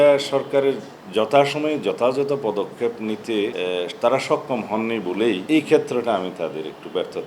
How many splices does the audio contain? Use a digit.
2